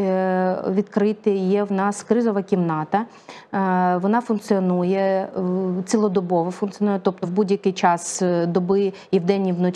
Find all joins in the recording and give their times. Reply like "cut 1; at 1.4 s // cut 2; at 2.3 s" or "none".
none